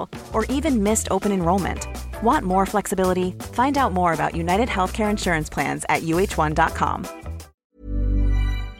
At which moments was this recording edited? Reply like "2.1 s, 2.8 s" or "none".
7.6 s